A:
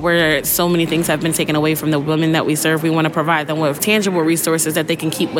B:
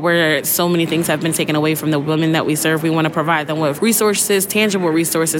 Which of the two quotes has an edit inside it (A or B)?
A